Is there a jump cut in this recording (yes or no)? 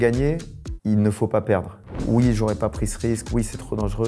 yes